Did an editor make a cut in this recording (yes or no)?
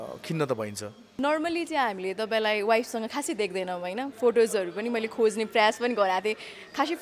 yes